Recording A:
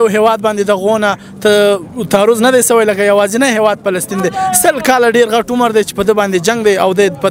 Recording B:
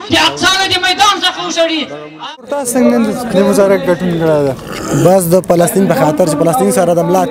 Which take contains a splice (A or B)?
B